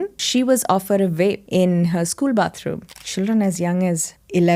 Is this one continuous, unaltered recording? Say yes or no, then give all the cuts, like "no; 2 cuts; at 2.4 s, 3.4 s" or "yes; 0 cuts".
no; 1 cut; at 2.9 s